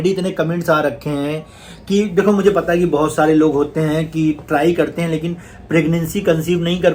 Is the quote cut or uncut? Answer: uncut